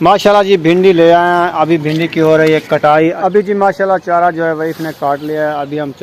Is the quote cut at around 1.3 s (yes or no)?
no